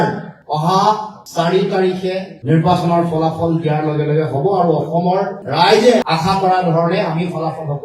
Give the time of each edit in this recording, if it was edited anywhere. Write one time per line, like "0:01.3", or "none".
0:06.0